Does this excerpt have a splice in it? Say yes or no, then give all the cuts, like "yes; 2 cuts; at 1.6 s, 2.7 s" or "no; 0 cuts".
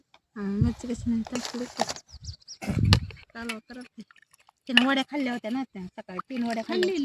no; 0 cuts